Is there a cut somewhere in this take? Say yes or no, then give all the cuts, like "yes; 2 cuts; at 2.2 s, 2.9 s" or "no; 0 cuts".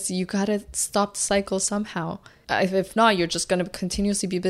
yes; 1 cut; at 2.3 s